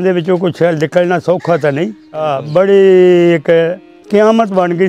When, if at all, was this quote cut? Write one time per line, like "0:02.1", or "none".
0:02.2